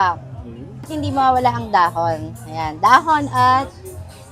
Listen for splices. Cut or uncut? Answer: cut